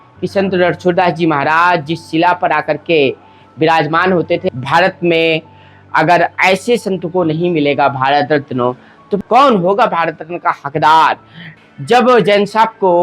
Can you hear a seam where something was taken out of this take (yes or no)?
yes